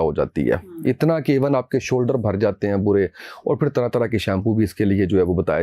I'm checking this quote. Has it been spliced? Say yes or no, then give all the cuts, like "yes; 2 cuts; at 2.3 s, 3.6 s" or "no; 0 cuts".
no; 0 cuts